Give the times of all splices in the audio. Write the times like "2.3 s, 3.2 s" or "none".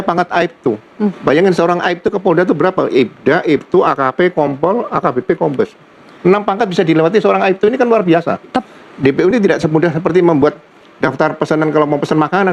1.2 s, 8.6 s